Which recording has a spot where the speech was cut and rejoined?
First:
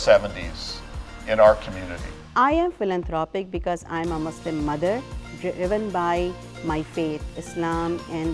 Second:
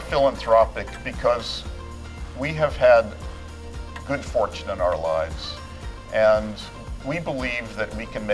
first; 1 cut; at 2.2 s

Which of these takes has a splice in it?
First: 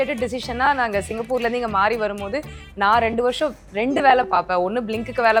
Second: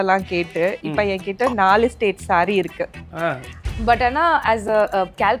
second; 1 cut; at 3.7 s

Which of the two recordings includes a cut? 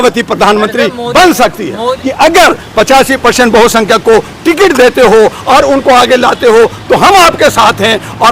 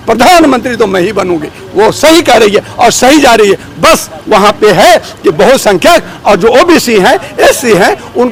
first; 1 cut; at 1.9 s

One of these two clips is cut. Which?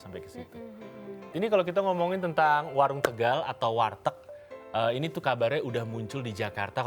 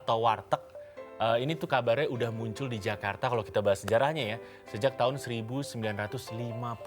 first; 1 cut; at 1.3 s

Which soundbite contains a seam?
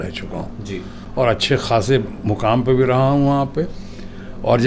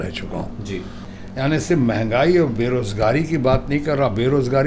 second; 1 cut; at 1.0 s

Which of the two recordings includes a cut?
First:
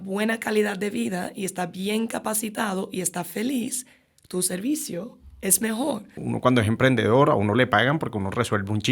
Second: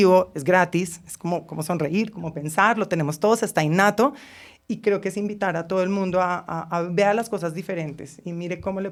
first; 1 cut; at 6.2 s

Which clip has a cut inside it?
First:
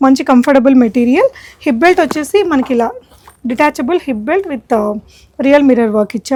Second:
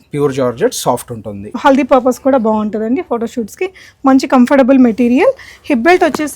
second; 1 cut; at 1.6 s

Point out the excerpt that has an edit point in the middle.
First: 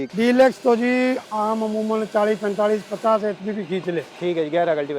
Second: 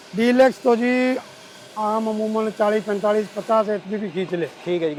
first; 1 cut; at 1.3 s

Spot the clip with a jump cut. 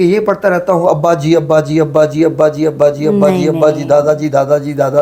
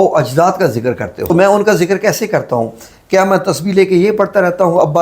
second; 1 cut; at 1.3 s

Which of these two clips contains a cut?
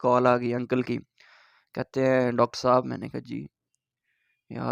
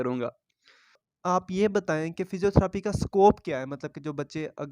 second; 1 cut; at 1.0 s

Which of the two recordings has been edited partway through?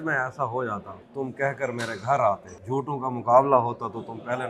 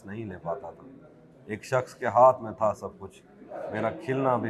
first; 2 cuts; at 1.0 s, 2.5 s

